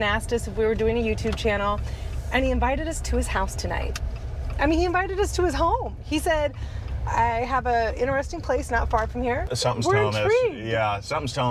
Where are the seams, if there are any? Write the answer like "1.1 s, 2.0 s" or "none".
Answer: none